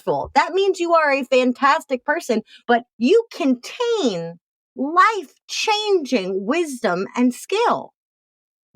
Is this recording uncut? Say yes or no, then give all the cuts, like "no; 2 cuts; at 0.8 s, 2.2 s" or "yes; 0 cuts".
no; 1 cut; at 2.6 s